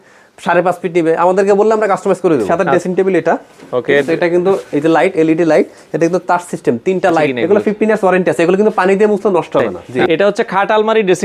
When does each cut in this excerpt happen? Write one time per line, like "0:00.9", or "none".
0:02.5
0:07.3
0:09.9